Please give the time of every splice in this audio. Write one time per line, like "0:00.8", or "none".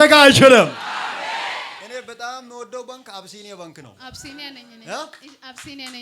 0:01.8

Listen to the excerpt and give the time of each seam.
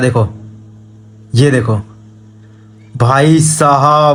none

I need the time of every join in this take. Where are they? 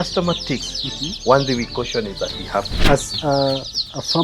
0:02.8

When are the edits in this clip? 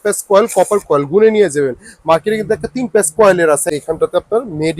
0:03.7

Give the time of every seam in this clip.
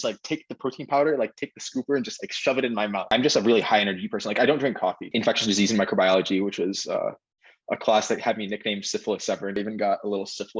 0:03.1
0:05.1
0:09.6

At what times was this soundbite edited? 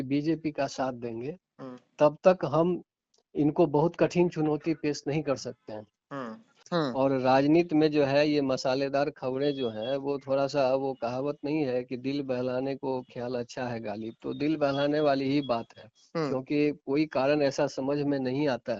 0:06.5

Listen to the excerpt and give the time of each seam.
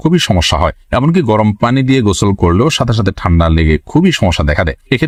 none

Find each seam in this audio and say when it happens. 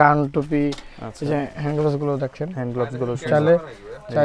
none

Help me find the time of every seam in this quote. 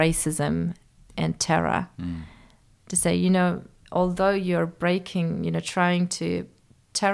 0:01.1

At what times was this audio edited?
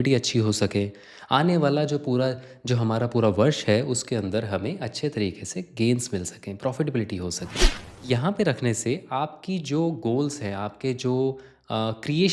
0:07.9

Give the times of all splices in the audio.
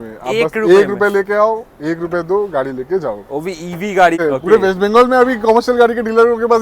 0:04.2

